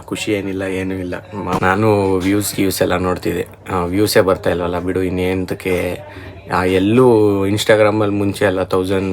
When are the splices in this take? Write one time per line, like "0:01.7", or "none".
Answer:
0:01.6